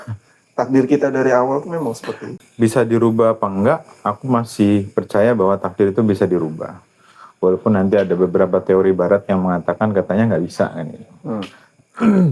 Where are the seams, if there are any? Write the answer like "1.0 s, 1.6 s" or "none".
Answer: 2.3 s